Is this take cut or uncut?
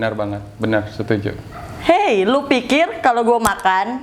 uncut